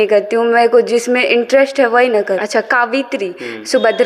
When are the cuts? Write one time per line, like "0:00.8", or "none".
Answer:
0:02.2